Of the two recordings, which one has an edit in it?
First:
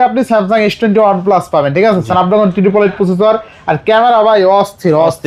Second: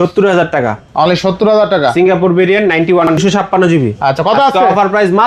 second; 1 cut; at 3.2 s

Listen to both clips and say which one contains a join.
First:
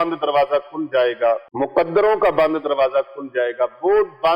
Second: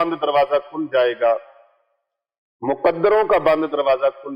first; 1 cut; at 1.5 s

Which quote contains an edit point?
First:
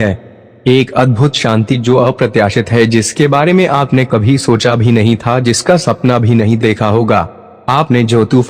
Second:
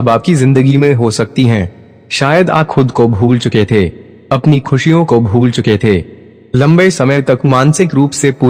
first; 1 cut; at 5.6 s

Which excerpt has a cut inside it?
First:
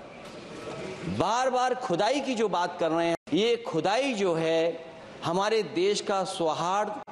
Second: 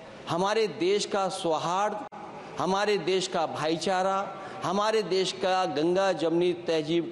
first; 1 cut; at 3.2 s

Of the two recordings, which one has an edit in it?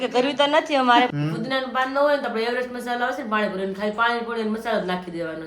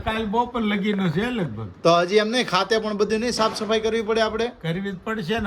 first; 1 cut; at 1.1 s

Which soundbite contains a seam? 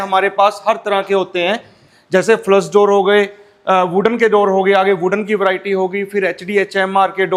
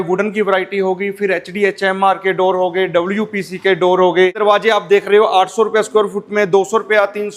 second; 1 cut; at 4.4 s

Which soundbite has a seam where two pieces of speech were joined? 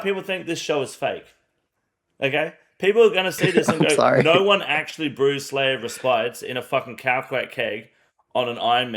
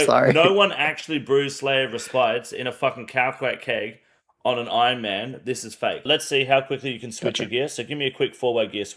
second; 1 cut; at 6.1 s

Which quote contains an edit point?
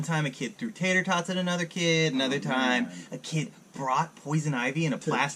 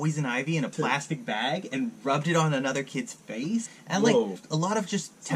second; 2 cuts; at 3.7 s, 4.4 s

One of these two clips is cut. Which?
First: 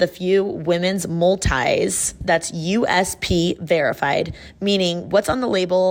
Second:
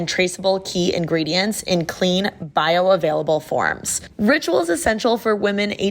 second; 1 cut; at 4.0 s

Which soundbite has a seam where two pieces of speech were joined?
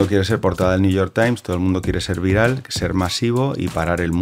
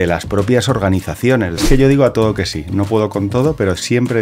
second; 1 cut; at 1.6 s

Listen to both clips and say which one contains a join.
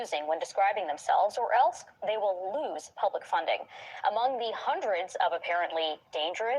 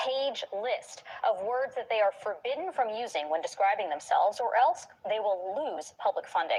first; 1 cut; at 4.8 s

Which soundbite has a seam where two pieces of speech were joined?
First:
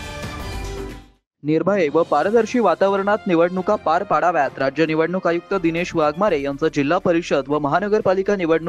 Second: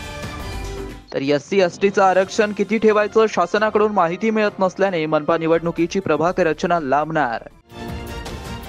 first; 1 cut; at 1.0 s

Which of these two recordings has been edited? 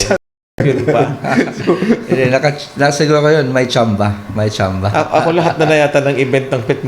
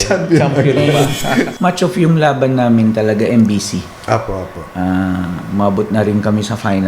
second; 1 cut; at 1.5 s

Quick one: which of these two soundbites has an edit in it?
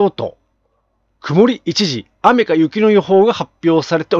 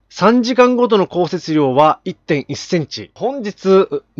second; 1 cut; at 3.1 s

